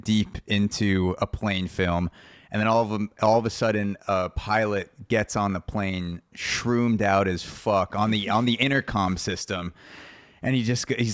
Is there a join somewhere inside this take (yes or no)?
no